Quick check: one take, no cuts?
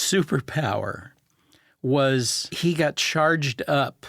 yes; 0 cuts

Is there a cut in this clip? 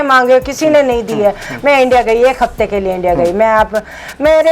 no; 0 cuts

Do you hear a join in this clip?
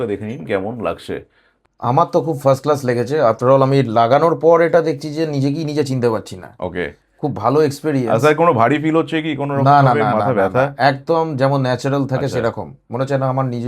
yes; 1 cut; at 1.5 s

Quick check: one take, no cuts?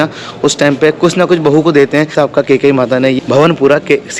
yes; 0 cuts

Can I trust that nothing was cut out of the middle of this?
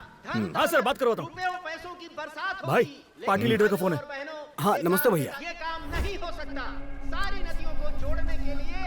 no; 2 cuts; at 5.4 s, 7.0 s

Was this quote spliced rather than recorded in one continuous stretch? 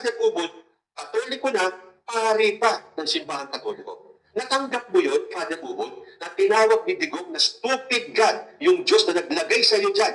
no; 0 cuts

